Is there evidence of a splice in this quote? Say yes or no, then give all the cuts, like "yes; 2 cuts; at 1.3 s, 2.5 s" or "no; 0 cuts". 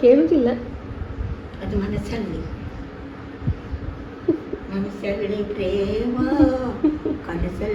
no; 0 cuts